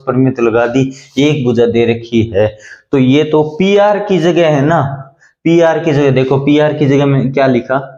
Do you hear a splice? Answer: no; 0 cuts

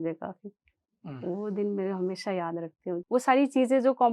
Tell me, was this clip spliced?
yes; 1 cut; at 3.0 s

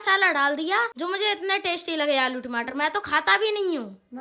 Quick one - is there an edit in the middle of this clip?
yes; 1 cut; at 0.9 s

